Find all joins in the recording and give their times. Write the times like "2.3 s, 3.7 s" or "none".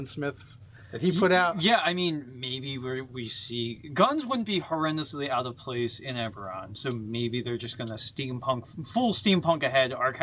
7.7 s